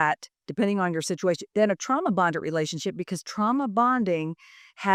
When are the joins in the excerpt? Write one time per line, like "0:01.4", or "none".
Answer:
none